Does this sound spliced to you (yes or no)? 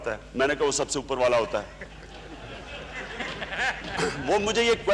no